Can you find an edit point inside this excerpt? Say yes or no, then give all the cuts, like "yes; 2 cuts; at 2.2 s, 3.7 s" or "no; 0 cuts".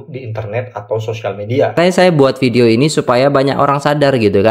yes; 1 cut; at 1.8 s